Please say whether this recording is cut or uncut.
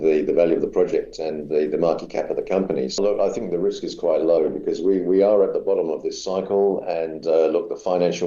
cut